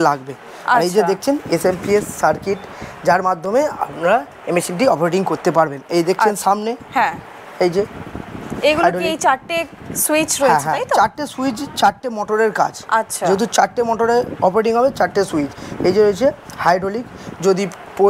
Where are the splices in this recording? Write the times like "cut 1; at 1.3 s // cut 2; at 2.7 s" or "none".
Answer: none